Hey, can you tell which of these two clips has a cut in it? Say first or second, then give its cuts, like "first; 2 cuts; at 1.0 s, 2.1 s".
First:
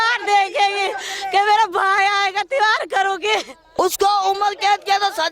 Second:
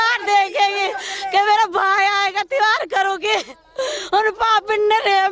first; 1 cut; at 3.6 s